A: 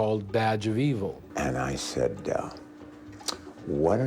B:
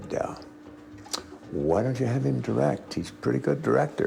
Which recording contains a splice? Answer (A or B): A